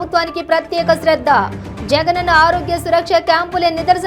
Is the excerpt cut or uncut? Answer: uncut